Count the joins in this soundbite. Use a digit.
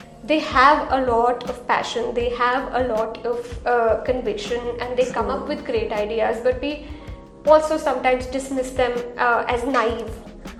0